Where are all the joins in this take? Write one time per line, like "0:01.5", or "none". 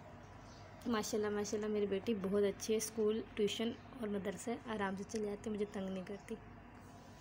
none